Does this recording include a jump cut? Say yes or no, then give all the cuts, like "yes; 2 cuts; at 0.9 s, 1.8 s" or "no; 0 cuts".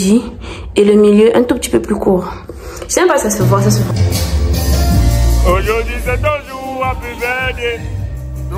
yes; 1 cut; at 3.9 s